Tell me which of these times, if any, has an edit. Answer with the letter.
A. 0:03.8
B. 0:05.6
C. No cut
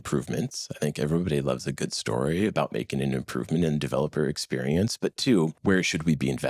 B